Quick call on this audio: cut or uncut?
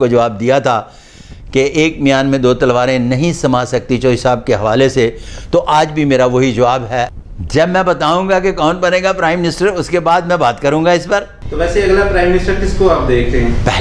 cut